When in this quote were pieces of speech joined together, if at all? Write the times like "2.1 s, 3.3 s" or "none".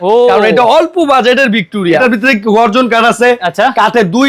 2.0 s